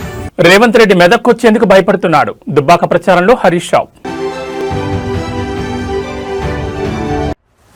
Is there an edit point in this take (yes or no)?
no